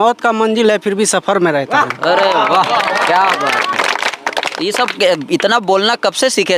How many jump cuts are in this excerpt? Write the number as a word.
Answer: zero